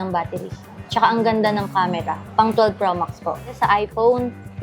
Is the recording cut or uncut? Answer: cut